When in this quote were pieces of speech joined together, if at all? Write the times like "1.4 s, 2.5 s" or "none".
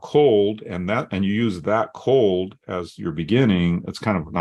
none